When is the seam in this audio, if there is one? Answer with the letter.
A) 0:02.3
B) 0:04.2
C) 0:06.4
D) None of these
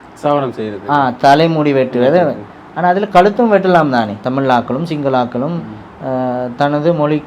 B